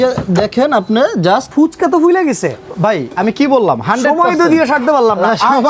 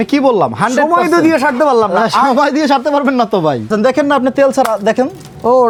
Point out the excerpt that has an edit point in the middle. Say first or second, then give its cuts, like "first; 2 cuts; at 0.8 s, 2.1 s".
first; 1 cut; at 1.5 s